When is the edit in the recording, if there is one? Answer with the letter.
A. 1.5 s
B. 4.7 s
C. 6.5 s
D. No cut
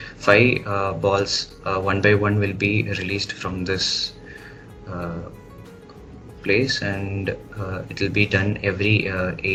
D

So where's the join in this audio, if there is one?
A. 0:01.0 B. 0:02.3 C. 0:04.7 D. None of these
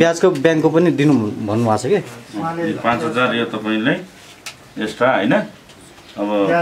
D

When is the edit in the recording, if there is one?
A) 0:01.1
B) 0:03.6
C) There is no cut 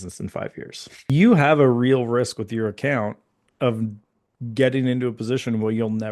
A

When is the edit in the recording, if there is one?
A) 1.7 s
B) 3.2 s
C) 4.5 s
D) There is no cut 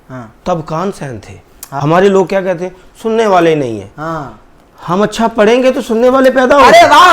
A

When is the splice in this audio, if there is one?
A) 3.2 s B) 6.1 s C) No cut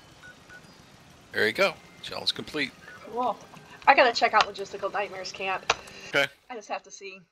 B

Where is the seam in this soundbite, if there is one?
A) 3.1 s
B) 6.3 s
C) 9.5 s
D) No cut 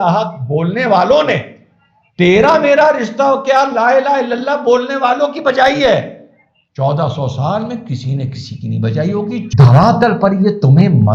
C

